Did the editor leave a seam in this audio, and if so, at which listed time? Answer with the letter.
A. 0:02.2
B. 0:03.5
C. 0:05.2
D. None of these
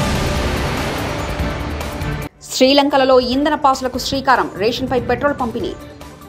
A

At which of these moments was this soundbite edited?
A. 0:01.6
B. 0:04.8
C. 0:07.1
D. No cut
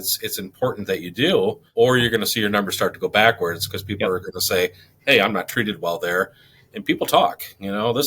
A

